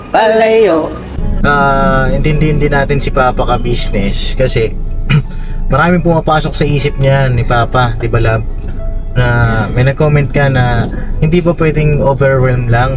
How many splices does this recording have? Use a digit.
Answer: 1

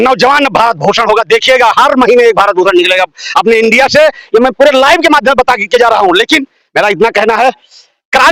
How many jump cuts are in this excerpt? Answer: 0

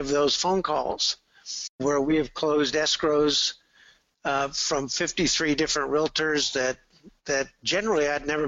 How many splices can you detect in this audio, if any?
1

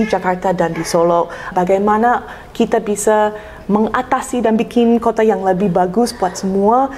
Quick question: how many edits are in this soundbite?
1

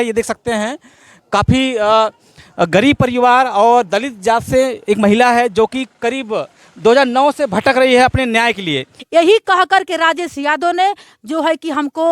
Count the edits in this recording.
1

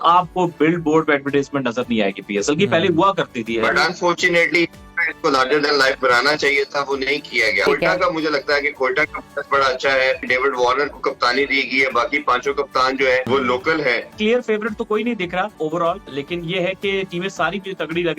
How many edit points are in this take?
6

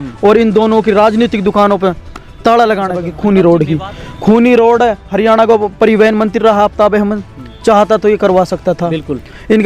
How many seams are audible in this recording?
1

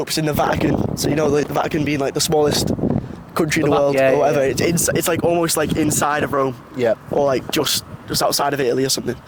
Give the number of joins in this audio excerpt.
0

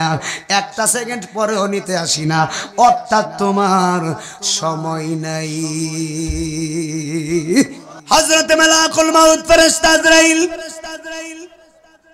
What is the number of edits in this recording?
1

